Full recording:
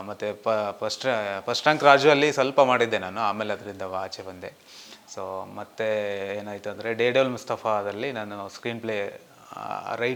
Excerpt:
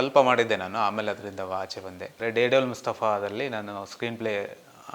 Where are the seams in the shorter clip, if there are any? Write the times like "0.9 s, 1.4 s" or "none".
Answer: 2.1 s